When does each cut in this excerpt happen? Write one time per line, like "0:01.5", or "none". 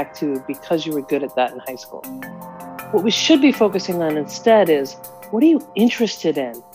0:02.2